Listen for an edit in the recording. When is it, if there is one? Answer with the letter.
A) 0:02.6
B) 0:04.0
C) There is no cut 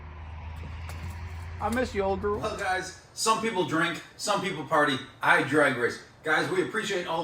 A